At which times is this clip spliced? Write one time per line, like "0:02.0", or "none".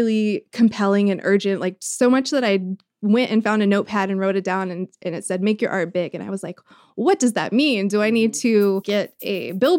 0:08.8